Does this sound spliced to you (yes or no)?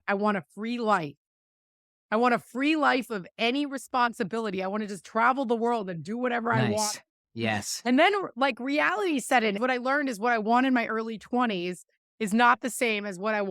yes